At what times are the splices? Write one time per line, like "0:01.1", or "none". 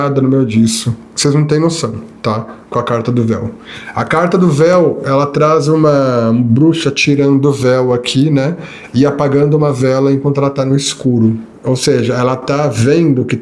0:01.0
0:02.1
0:11.5